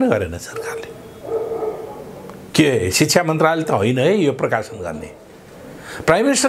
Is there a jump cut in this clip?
no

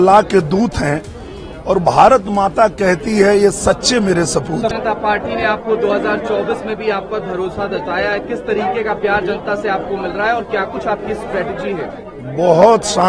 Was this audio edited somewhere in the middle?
yes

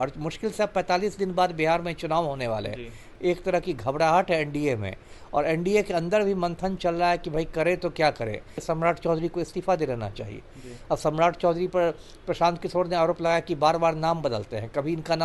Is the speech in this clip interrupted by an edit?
yes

